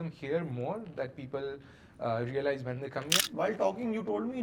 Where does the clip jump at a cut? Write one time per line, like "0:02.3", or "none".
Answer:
0:03.2